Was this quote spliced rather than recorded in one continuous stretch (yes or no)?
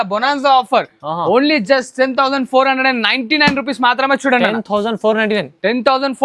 no